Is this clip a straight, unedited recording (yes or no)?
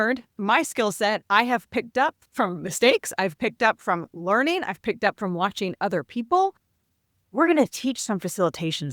no